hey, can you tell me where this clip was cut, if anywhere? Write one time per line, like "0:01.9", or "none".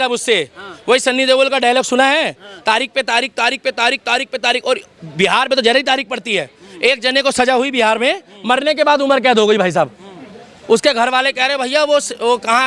none